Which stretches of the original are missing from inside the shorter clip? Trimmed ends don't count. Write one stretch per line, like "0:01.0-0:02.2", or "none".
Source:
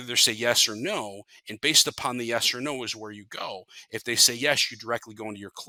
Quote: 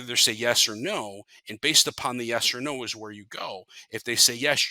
none